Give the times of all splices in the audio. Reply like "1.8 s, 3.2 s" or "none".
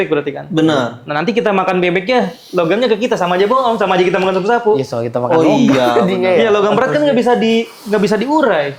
none

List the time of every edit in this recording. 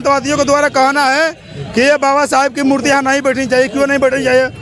none

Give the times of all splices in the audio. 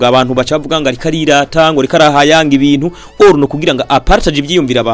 none

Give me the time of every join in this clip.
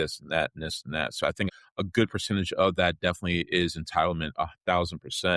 1.5 s

